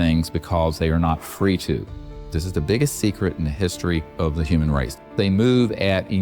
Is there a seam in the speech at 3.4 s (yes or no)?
no